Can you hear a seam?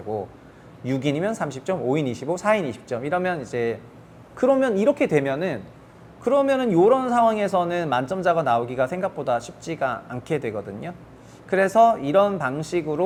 no; 0 cuts

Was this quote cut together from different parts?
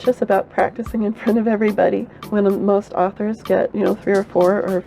yes; 2 cuts; at 2.2 s, 3.7 s

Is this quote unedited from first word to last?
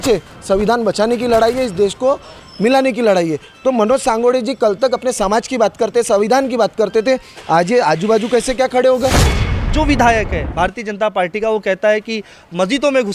no; 1 cut; at 9.5 s

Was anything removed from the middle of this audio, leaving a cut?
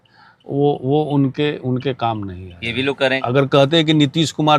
yes; 1 cut; at 3.2 s

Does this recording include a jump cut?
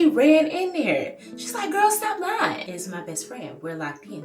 yes; 1 cut; at 2.8 s

